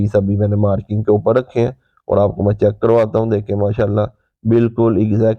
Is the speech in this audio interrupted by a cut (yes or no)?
no